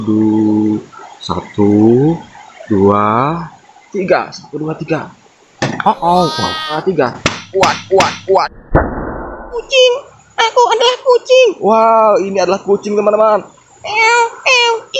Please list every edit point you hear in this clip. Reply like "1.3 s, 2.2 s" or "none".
6.8 s, 9.7 s

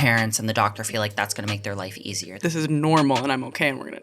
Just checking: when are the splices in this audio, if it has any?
2.3 s

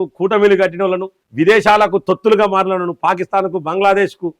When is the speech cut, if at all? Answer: none

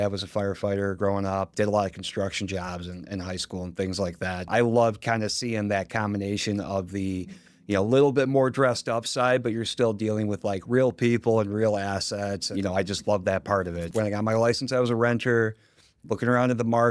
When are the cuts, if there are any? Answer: 1.5 s, 4.5 s, 12.5 s, 13.8 s

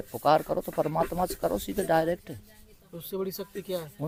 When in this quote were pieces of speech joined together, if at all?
none

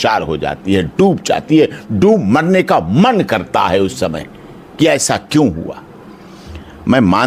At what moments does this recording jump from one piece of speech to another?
none

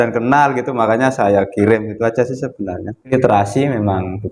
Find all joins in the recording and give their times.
3.1 s

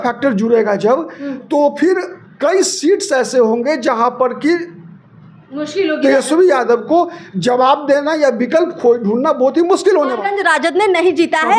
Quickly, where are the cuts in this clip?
10.2 s

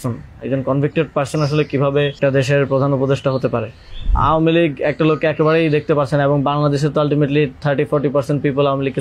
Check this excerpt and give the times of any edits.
2.2 s, 4.1 s

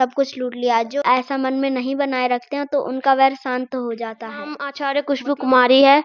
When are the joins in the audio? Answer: 0.9 s, 4.6 s

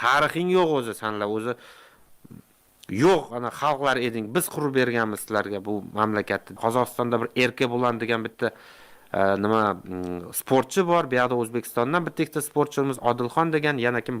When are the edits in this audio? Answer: 6.6 s

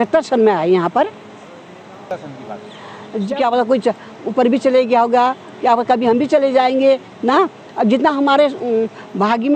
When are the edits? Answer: 3.3 s

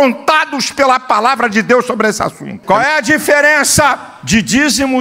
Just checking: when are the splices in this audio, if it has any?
2.6 s

